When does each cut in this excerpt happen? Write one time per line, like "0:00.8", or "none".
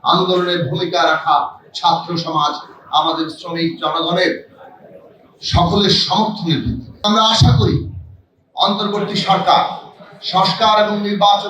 0:07.0

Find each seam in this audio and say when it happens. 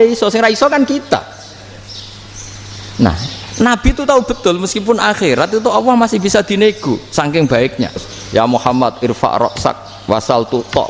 0:08.1

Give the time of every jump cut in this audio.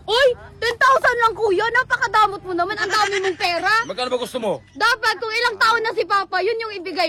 none

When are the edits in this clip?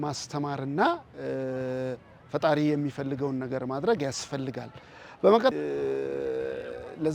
0:05.5

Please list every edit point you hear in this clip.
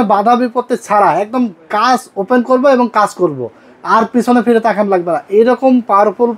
none

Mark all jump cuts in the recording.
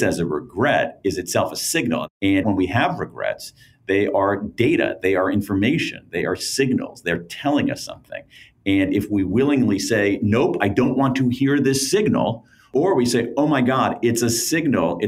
0:02.0
0:12.7

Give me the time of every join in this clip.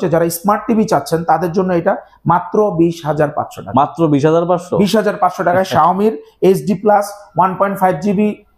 none

